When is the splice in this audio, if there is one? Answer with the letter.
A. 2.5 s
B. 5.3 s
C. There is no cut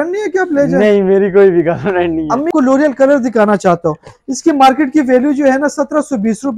A